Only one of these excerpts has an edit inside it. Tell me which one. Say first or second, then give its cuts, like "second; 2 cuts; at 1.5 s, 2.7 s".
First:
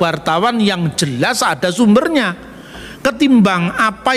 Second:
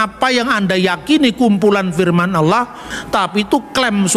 second; 1 cut; at 2.9 s